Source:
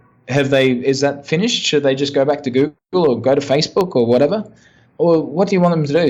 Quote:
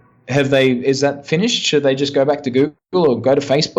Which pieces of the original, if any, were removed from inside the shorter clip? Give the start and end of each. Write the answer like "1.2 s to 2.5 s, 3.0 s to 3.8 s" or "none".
none